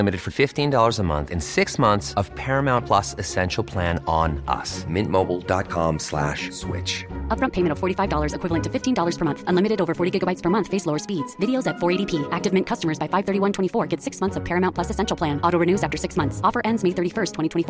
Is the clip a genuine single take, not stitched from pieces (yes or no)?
yes